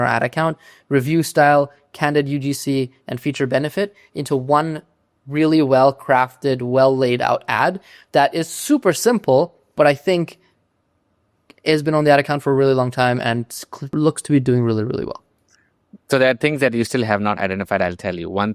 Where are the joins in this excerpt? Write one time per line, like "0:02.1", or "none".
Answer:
none